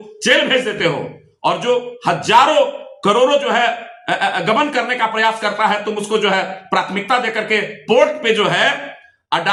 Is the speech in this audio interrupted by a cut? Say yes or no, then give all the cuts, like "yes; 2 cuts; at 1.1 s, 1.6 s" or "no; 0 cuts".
no; 0 cuts